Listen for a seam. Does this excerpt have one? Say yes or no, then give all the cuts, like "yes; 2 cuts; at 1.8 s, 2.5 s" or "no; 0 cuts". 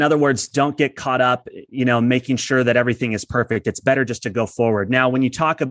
no; 0 cuts